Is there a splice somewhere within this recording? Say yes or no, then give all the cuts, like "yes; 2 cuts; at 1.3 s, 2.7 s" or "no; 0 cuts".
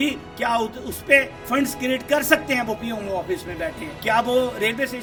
no; 0 cuts